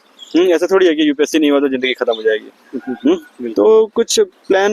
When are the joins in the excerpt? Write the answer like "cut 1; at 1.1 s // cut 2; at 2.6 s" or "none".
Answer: none